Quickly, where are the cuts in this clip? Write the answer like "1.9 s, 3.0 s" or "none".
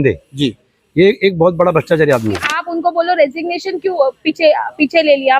2.6 s